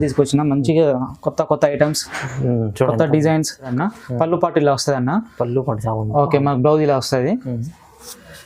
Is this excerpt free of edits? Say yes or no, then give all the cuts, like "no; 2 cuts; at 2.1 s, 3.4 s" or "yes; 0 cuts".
no; 1 cut; at 3.7 s